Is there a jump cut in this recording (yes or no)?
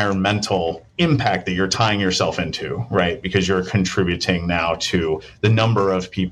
no